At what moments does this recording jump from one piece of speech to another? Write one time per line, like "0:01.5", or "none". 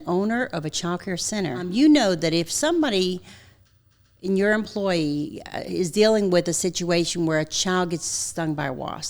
0:01.7